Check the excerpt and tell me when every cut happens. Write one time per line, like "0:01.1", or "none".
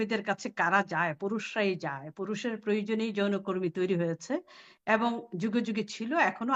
none